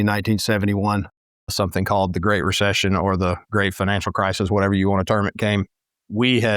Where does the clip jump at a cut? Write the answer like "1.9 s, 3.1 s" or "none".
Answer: 1.1 s